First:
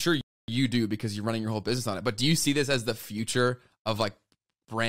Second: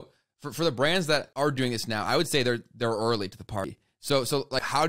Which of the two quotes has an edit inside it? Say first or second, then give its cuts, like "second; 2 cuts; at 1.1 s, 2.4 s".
second; 1 cut; at 1.3 s